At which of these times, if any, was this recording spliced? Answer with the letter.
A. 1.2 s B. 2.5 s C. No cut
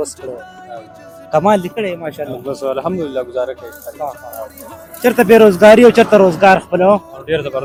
C